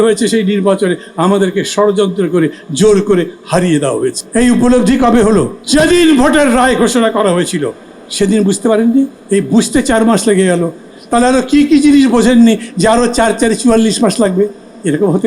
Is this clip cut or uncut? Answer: cut